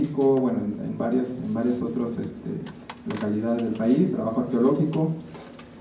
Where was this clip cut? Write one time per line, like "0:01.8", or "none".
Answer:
0:04.6

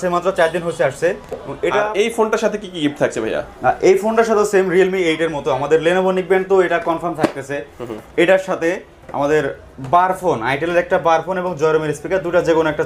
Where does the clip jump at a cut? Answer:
0:01.7

